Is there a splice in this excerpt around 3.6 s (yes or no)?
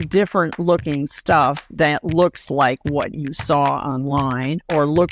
no